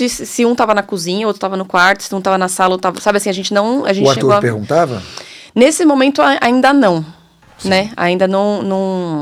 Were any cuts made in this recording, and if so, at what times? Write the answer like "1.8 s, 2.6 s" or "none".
none